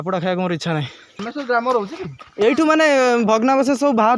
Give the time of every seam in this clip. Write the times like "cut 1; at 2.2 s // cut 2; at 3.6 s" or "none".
cut 1; at 1.2 s